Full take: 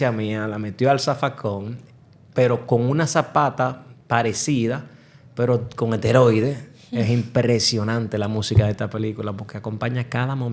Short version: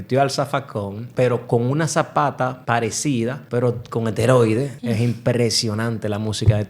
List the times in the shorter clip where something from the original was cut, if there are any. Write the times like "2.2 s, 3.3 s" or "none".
1.0 s, 2.9 s, 4.8 s